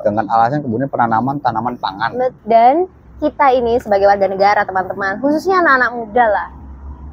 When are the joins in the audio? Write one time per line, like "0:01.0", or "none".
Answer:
0:02.4

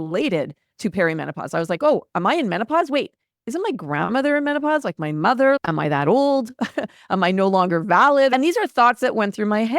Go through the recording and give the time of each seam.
0:05.6
0:08.3

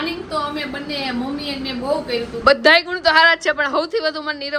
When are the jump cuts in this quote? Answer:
0:02.4

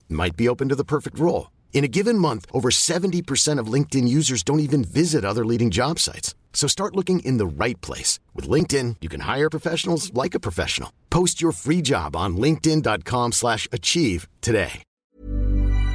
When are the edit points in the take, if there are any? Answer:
0:14.9

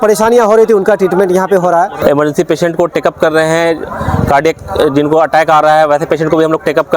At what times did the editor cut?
0:01.9

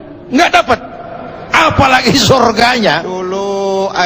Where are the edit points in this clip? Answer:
0:02.6

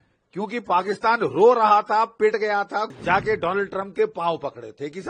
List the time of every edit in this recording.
0:02.9

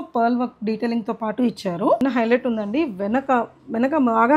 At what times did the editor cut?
0:02.0

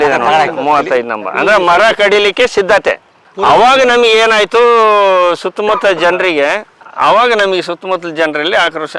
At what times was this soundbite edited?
none

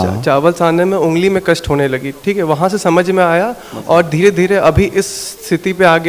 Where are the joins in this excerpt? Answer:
none

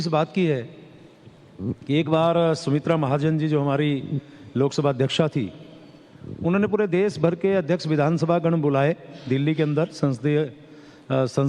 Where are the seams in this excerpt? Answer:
0:03.5

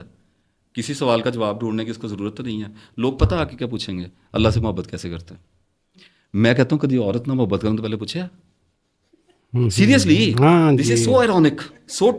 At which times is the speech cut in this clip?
none

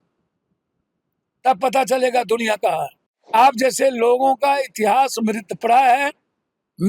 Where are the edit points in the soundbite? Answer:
0:03.3

